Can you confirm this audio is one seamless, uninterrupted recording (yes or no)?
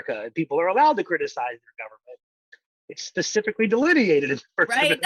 yes